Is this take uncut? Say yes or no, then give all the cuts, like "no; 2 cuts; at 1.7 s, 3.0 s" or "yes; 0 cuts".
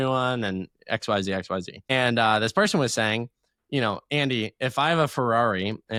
yes; 0 cuts